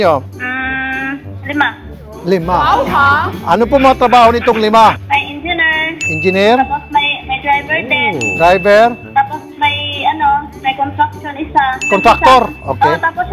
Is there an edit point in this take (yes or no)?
yes